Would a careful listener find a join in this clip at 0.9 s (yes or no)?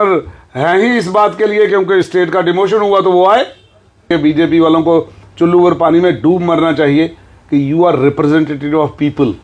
no